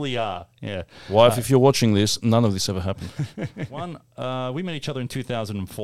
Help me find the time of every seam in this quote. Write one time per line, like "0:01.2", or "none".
0:03.8